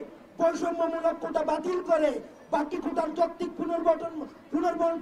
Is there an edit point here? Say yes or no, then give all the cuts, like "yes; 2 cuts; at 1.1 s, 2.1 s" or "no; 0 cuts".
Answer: no; 0 cuts